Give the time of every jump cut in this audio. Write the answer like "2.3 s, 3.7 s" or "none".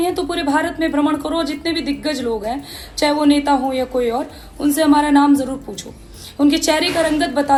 none